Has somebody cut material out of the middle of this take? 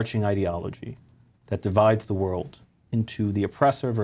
no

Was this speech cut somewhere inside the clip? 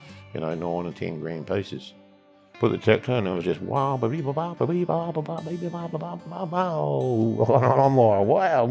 yes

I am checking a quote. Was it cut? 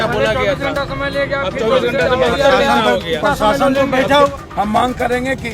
yes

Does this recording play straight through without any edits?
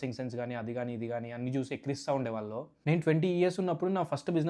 no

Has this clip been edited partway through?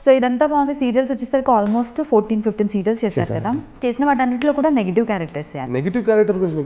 yes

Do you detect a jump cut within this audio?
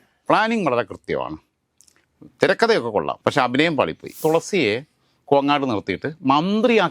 yes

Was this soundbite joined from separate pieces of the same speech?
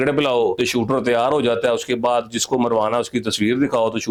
no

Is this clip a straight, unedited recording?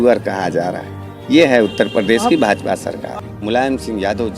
no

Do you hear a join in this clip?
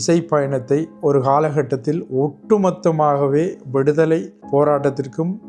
yes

